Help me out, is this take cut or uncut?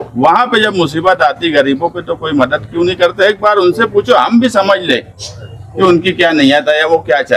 uncut